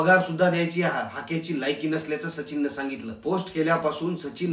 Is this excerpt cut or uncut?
cut